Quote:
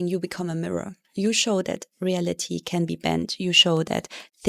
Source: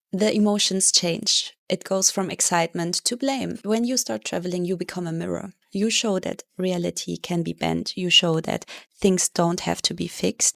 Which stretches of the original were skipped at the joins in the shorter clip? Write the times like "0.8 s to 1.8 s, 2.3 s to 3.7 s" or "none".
none